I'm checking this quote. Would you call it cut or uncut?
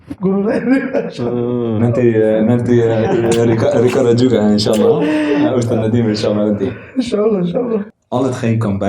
cut